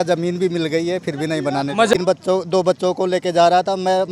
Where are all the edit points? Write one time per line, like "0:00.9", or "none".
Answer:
0:02.0